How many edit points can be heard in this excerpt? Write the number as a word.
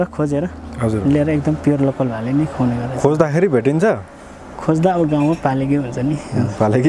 zero